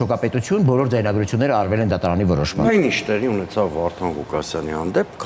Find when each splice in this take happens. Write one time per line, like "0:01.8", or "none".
0:02.7